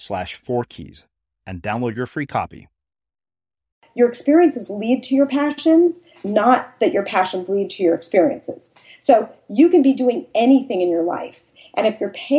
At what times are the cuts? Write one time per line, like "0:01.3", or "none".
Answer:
0:03.8